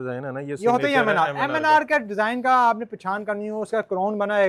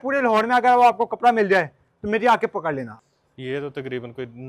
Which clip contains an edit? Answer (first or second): second